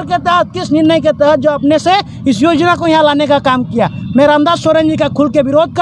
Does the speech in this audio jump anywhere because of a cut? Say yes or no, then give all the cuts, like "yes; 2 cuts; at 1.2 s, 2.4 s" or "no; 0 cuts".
no; 0 cuts